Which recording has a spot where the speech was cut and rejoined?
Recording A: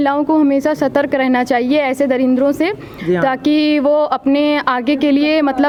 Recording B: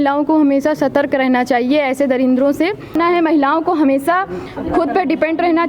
B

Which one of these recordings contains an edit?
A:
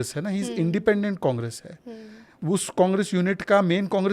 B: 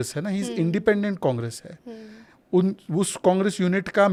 A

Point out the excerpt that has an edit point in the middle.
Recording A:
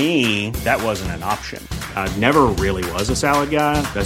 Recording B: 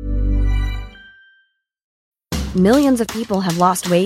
B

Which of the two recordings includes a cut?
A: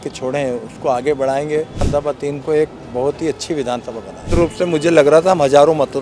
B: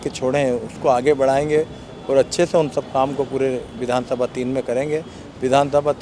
A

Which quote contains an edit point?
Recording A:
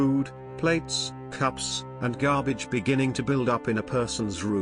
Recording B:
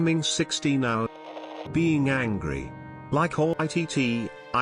B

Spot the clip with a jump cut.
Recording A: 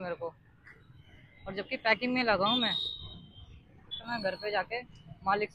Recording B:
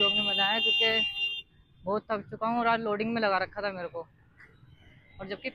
A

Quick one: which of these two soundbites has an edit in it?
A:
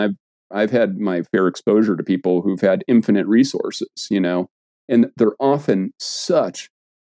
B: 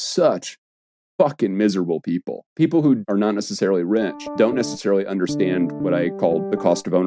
B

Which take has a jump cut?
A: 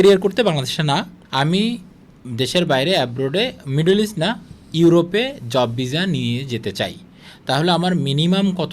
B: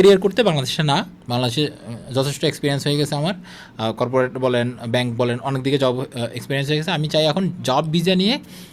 A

